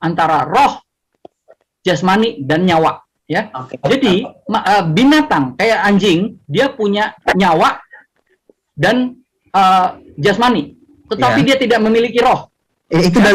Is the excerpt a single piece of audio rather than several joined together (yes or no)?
yes